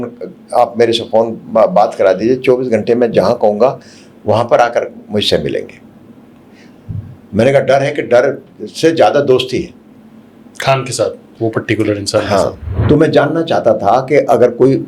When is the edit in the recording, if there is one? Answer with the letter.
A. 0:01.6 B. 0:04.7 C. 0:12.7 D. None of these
C